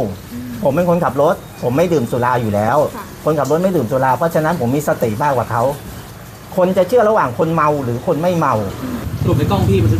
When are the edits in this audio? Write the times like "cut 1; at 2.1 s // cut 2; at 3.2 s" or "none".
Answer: none